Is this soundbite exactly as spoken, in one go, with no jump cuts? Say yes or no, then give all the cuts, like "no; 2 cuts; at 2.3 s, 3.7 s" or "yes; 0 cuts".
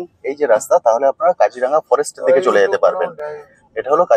yes; 0 cuts